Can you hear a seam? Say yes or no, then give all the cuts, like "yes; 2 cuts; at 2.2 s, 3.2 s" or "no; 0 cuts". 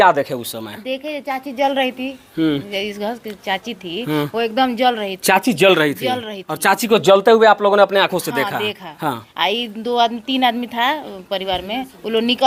no; 0 cuts